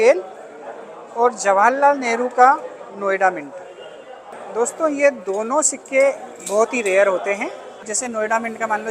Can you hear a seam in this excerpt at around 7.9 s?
yes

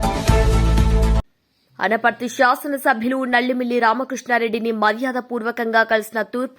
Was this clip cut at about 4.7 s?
no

